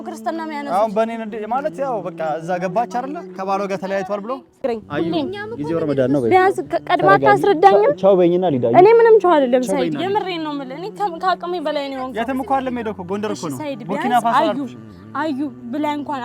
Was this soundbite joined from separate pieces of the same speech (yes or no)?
yes